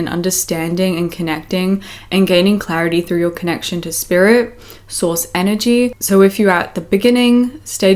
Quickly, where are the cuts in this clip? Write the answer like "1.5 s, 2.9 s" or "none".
5.9 s